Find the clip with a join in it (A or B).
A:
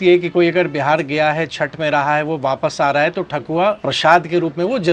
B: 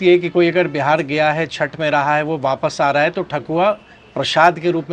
A